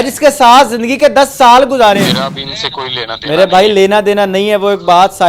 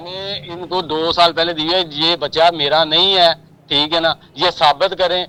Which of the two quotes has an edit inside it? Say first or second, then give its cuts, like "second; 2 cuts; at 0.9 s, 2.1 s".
first; 1 cut; at 2.0 s